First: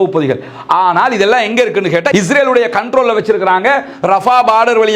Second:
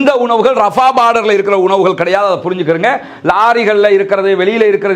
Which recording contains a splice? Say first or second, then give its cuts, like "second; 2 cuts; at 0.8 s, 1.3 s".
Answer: first; 1 cut; at 2.1 s